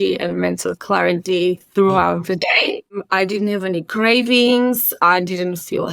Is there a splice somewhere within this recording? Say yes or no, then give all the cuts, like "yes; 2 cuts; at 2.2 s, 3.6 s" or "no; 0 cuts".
yes; 1 cut; at 2.9 s